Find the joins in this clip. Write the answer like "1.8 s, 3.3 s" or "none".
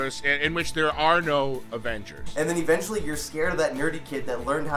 2.2 s